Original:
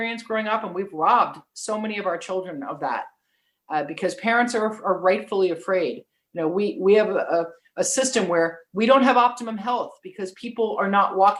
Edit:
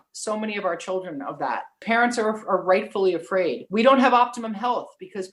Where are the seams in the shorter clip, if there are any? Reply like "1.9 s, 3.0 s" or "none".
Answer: 1.8 s, 3.6 s